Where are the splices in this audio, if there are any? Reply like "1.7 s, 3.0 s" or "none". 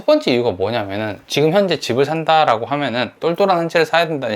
1.2 s, 3.1 s